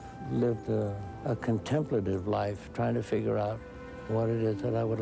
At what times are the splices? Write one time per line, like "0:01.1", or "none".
0:01.1